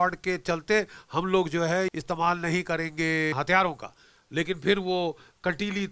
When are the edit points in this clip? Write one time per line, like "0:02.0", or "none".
0:01.9
0:03.3